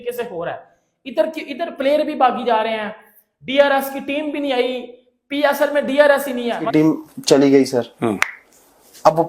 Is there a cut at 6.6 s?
yes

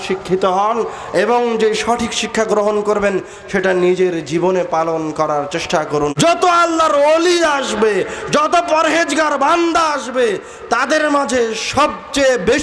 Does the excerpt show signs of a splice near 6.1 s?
yes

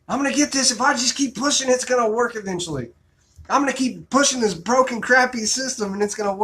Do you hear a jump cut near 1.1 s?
no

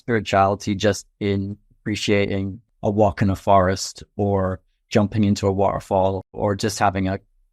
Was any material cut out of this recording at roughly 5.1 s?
no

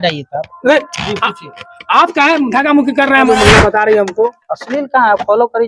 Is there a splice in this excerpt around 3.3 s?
yes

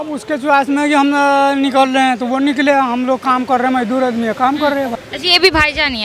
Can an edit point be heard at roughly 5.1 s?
yes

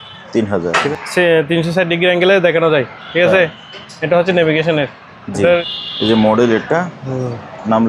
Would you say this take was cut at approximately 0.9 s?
yes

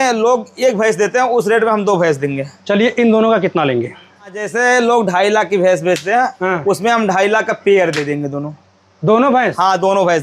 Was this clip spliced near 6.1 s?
no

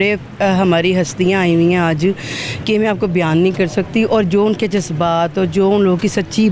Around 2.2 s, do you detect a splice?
no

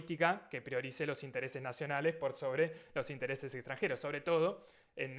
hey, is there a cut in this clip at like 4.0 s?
no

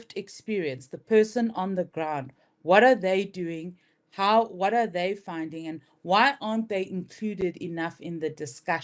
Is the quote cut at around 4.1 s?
no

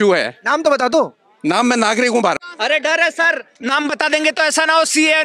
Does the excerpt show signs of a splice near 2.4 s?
yes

